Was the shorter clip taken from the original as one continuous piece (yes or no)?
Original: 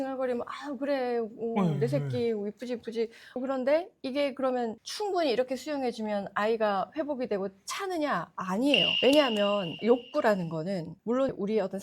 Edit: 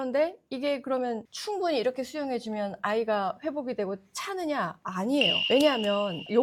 yes